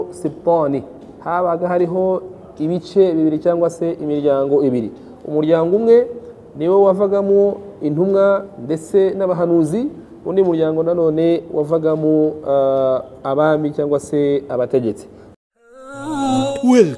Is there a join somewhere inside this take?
yes; 1 cut; at 15.3 s

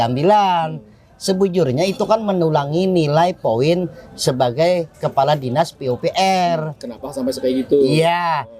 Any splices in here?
no; 0 cuts

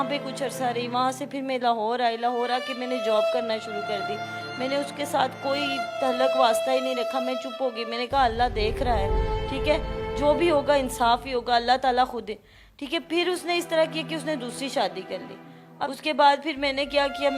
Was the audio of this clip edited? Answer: yes; 1 cut; at 15.5 s

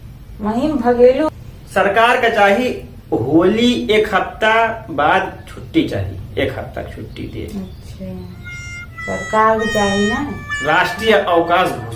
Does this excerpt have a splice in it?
yes; 1 cut; at 1.3 s

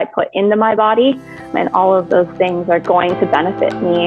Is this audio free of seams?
no; 2 cuts; at 1.5 s, 2.9 s

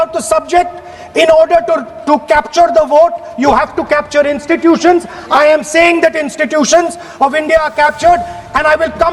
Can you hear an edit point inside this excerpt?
no; 0 cuts

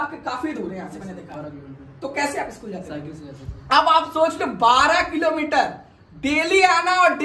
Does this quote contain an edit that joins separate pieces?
no; 0 cuts

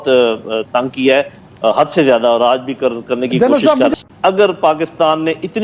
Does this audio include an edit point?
yes; 1 cut; at 4.1 s

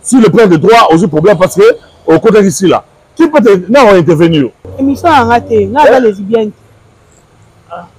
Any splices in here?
yes; 1 cut; at 4.7 s

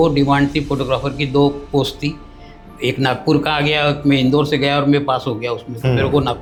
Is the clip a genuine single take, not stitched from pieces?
yes; 0 cuts

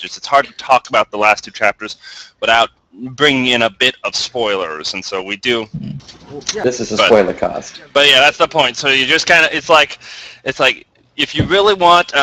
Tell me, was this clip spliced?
no; 0 cuts

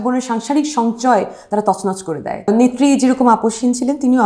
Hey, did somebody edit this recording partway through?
yes; 1 cut; at 2.5 s

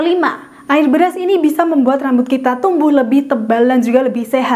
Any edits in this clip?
no; 0 cuts

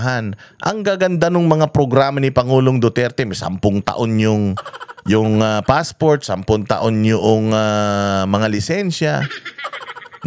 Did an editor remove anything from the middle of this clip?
no; 0 cuts

